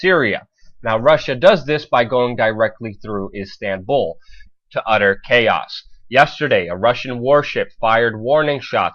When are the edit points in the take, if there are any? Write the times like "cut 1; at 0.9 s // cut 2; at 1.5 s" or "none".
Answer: none